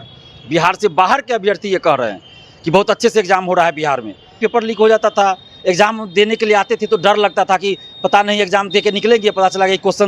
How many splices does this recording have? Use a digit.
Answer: 1